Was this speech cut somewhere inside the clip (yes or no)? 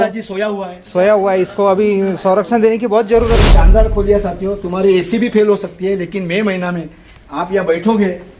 yes